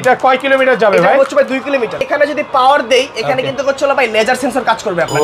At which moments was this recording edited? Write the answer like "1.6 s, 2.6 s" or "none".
2.0 s